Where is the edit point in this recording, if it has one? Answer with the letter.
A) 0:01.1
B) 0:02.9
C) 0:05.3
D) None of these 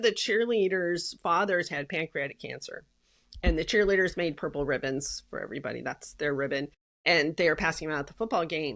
D